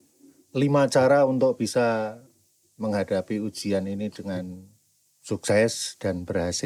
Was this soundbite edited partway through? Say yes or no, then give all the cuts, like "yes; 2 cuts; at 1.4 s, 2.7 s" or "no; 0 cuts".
no; 0 cuts